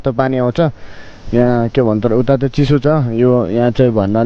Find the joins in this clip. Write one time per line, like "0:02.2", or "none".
none